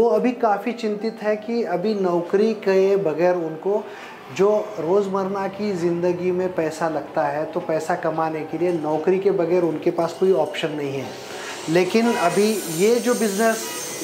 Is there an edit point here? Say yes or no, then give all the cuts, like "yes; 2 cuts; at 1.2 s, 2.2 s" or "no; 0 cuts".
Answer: no; 0 cuts